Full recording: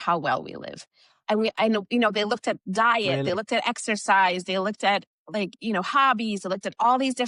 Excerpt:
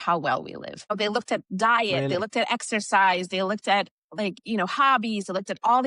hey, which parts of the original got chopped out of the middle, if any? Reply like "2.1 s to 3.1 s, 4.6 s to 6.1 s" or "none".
0.9 s to 2.1 s